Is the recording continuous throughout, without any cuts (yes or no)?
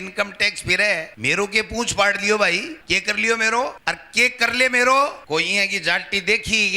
no